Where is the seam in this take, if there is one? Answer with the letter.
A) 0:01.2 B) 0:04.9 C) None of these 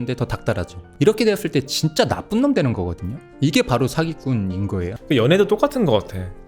B